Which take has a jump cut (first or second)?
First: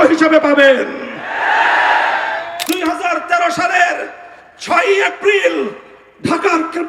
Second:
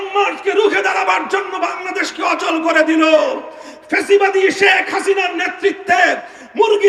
first